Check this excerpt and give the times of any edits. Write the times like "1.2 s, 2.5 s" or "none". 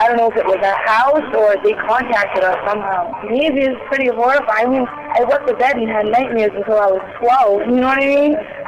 none